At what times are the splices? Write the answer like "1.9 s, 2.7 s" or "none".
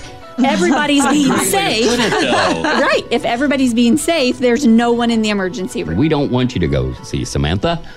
5.8 s